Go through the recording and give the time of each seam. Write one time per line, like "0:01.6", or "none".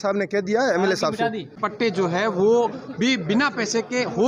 0:01.5